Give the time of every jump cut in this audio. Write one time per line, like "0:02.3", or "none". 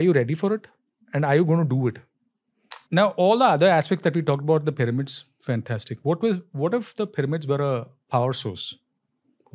0:02.7